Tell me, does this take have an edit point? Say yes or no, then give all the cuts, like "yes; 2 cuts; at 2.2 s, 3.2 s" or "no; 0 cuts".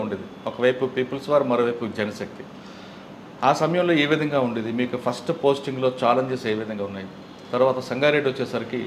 no; 0 cuts